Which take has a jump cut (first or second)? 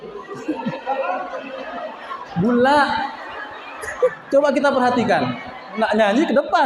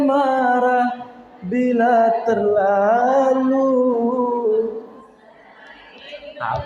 first